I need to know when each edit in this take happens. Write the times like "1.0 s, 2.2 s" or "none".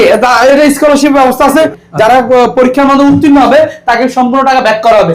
1.7 s